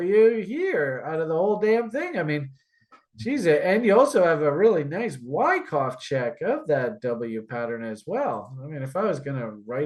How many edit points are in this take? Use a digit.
0